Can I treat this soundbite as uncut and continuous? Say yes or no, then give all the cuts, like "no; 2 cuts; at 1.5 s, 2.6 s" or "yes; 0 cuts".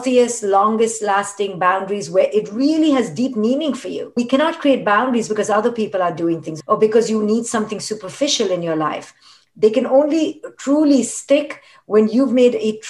no; 2 cuts; at 4.1 s, 6.5 s